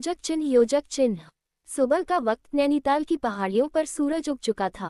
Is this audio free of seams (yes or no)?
no